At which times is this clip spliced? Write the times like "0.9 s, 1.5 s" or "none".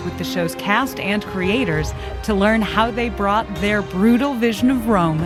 none